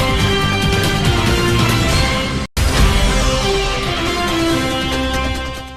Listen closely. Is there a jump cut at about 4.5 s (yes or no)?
no